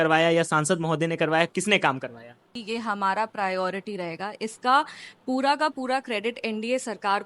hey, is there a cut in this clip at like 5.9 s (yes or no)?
no